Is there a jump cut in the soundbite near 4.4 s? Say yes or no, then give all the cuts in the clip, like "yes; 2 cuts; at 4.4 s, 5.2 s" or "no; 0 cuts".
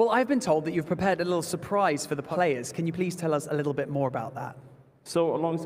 no; 1 cut; at 2.3 s